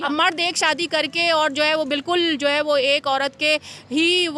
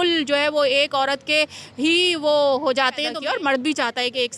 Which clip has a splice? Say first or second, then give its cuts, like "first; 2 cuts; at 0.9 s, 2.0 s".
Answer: second; 1 cut; at 3.2 s